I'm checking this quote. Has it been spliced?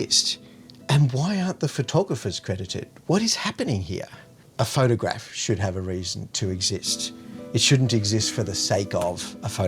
yes; 1 cut; at 4.1 s

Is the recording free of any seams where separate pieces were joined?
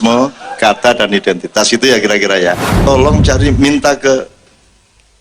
no; 1 cut; at 2.7 s

